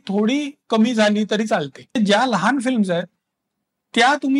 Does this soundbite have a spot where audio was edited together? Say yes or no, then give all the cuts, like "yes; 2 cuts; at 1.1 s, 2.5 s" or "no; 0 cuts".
yes; 1 cut; at 2.0 s